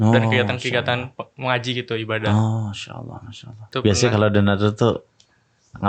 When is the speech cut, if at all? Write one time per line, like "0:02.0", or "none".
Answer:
0:03.6